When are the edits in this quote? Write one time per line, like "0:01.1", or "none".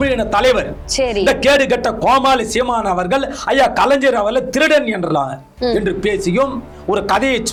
none